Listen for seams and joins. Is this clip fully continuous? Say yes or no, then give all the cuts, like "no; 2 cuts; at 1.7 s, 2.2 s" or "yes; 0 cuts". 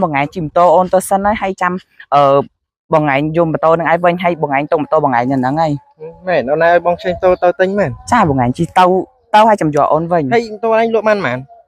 yes; 0 cuts